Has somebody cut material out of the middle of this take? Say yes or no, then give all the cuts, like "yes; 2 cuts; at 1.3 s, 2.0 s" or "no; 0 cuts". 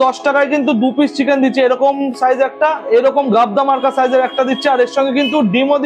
yes; 1 cut; at 2.8 s